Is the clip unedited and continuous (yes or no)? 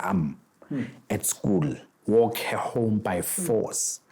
no